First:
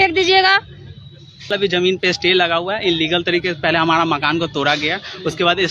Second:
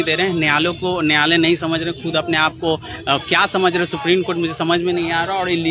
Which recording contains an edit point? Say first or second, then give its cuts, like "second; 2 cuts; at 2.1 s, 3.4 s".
first; 1 cut; at 1.5 s